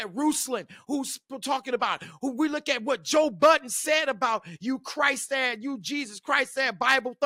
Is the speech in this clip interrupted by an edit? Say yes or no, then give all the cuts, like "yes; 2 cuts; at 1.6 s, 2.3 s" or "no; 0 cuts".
no; 0 cuts